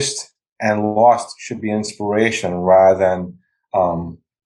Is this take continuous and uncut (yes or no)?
yes